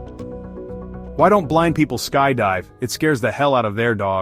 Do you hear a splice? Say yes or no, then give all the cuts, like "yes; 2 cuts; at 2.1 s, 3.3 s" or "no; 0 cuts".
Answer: yes; 1 cut; at 1.1 s